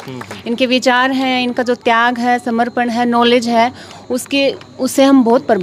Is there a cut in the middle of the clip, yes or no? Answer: no